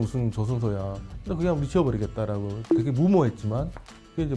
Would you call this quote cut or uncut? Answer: cut